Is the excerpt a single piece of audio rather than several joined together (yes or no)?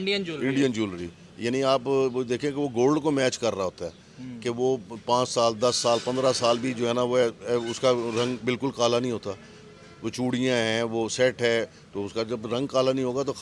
yes